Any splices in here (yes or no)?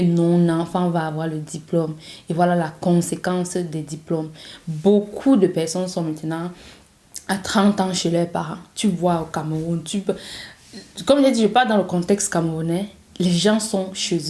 no